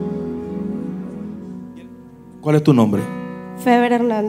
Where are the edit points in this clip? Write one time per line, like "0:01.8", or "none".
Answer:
0:01.4